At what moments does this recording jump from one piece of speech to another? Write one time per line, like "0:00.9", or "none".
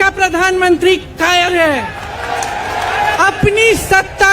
0:02.9